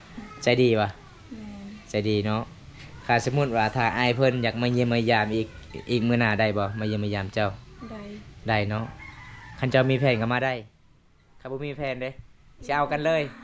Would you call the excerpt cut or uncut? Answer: uncut